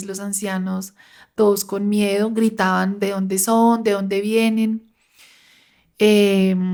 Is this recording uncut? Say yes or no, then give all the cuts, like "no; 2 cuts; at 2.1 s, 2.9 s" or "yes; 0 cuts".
yes; 0 cuts